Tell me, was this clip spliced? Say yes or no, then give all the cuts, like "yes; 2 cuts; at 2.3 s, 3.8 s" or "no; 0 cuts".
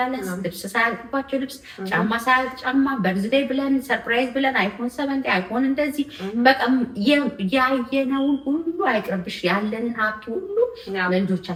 no; 0 cuts